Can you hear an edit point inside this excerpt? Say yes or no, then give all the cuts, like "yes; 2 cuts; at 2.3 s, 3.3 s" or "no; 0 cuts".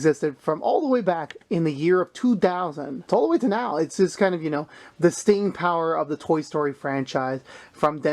yes; 1 cut; at 2.9 s